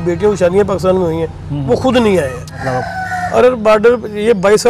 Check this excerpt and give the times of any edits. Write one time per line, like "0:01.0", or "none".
0:02.6